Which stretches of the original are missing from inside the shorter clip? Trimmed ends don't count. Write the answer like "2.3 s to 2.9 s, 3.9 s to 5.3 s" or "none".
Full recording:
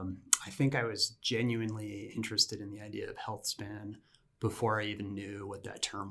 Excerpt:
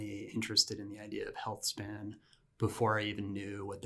none